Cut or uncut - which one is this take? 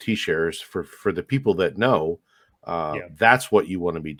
uncut